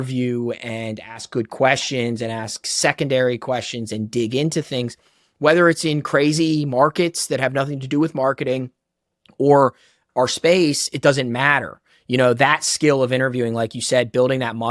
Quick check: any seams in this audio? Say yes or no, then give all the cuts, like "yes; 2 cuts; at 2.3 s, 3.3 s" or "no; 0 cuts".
no; 0 cuts